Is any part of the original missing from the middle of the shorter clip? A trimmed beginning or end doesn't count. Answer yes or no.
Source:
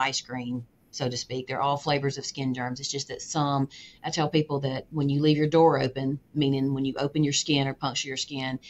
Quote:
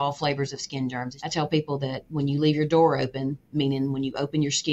yes